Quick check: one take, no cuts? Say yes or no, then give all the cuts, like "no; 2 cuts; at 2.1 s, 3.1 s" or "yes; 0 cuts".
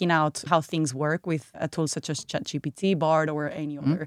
no; 1 cut; at 1.5 s